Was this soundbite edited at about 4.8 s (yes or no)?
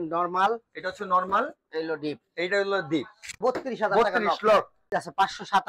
yes